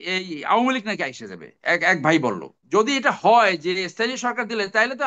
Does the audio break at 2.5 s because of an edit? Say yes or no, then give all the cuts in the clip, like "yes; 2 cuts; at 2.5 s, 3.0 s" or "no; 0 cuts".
yes; 1 cut; at 2.5 s